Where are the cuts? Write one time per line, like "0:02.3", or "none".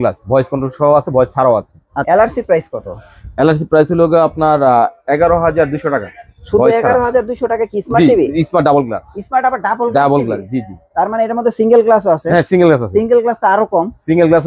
0:01.9